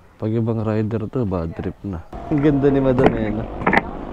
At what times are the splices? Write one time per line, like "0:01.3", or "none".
0:02.1